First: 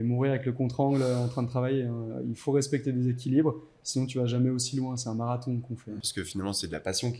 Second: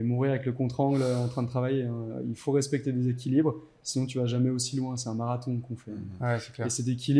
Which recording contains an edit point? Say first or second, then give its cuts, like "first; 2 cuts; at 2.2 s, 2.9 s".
first; 1 cut; at 6.0 s